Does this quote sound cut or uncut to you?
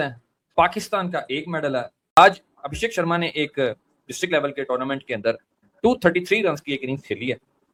uncut